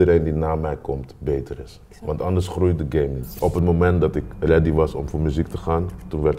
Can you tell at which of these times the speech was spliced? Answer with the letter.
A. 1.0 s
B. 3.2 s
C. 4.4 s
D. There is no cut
B